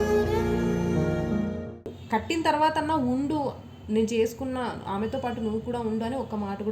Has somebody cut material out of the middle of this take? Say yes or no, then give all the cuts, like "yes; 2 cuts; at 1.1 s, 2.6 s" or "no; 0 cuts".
yes; 1 cut; at 1.9 s